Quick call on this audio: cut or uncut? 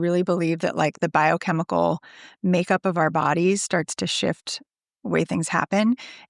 uncut